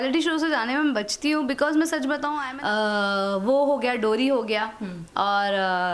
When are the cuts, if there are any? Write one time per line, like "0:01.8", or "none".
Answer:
0:02.5